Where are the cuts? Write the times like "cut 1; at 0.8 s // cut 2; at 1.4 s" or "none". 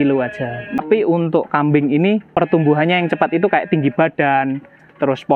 cut 1; at 0.8 s // cut 2; at 2.3 s